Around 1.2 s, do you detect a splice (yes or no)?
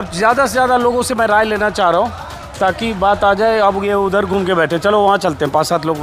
no